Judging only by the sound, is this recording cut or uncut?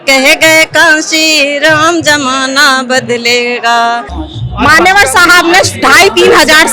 cut